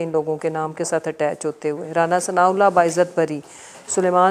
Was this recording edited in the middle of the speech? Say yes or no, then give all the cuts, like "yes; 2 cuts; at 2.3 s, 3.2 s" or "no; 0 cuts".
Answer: no; 0 cuts